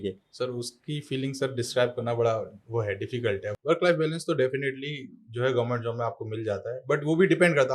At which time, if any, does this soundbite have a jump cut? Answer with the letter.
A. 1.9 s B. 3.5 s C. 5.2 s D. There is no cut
B